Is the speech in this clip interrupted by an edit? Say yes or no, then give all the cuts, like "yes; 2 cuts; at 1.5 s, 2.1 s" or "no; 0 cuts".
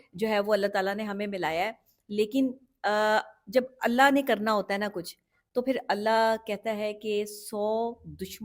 no; 0 cuts